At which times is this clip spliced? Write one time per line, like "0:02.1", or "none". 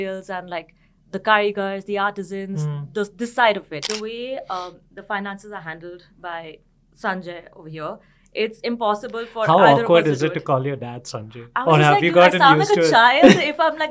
0:03.8